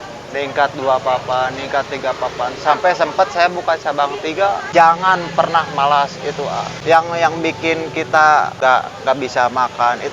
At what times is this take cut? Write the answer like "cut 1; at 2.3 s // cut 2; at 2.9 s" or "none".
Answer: cut 1; at 4.6 s // cut 2; at 6.7 s // cut 3; at 8.5 s